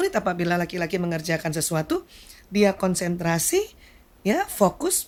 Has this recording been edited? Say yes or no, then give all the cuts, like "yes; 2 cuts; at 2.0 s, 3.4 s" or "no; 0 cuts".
no; 0 cuts